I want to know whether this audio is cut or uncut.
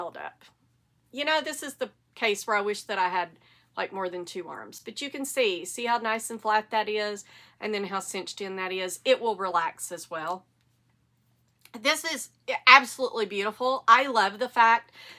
uncut